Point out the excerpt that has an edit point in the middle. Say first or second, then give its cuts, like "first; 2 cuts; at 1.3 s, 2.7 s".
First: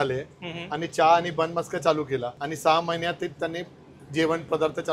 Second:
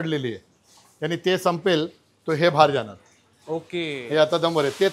first; 1 cut; at 2.4 s